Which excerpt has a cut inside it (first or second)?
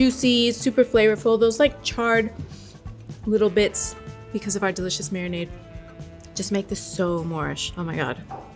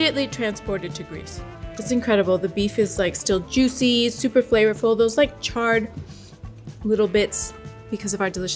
first